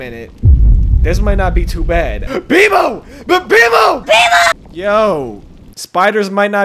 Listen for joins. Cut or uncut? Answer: cut